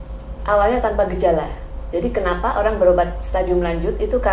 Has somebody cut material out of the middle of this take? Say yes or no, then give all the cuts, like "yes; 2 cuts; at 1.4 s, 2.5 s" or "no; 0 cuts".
no; 0 cuts